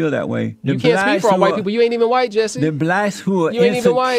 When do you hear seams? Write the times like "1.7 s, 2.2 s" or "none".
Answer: none